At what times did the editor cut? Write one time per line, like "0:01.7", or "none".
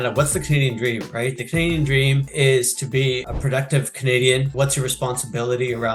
0:02.3
0:03.3
0:04.5